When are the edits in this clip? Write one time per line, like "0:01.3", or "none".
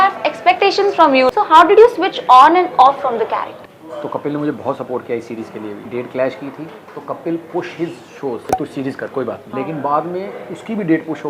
0:01.3
0:03.9
0:05.9
0:08.4
0:09.5